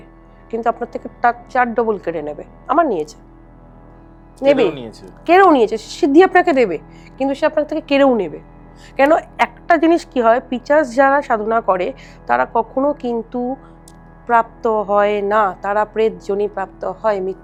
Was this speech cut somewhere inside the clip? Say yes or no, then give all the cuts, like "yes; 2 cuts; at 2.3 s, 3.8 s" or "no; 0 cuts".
no; 0 cuts